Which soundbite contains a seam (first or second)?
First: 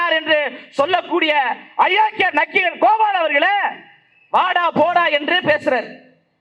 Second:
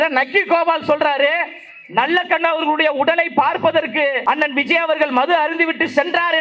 second